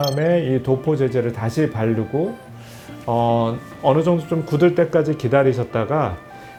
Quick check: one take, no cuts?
yes; 0 cuts

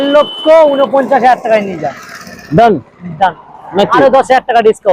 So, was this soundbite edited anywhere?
no; 0 cuts

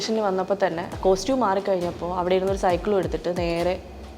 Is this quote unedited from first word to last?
no; 1 cut; at 0.9 s

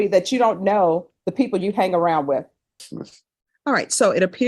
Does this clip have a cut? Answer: yes; 1 cut; at 2.6 s

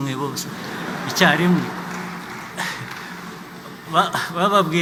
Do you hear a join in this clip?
no; 0 cuts

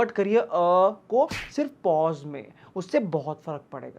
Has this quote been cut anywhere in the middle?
no; 0 cuts

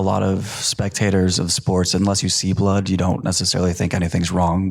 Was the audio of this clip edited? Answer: no; 0 cuts

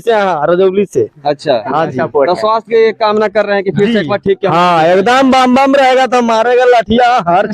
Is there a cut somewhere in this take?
no; 0 cuts

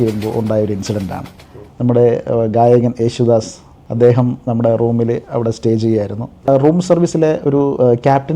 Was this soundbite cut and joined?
yes; 1 cut; at 6.3 s

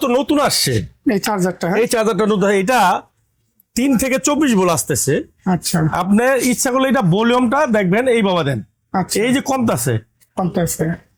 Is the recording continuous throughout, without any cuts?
yes; 0 cuts

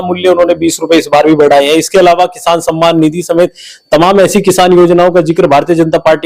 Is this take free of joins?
yes; 0 cuts

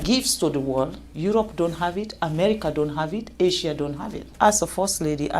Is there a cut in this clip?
yes; 2 cuts; at 1.0 s, 4.3 s

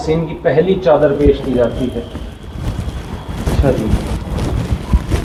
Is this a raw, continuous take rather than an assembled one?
yes; 0 cuts

